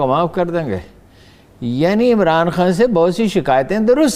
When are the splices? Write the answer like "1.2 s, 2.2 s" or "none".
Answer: none